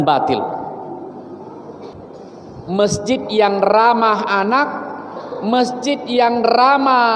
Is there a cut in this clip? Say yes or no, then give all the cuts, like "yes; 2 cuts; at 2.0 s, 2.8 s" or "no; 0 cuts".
yes; 1 cut; at 1.9 s